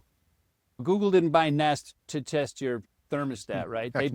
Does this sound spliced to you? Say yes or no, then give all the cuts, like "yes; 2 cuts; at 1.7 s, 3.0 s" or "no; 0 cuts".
yes; 2 cuts; at 0.8 s, 1.9 s